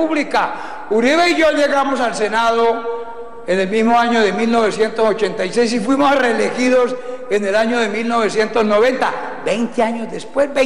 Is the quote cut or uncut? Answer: uncut